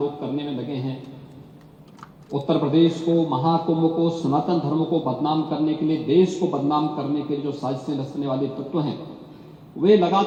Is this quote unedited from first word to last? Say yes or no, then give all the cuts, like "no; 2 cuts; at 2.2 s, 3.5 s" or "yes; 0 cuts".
yes; 0 cuts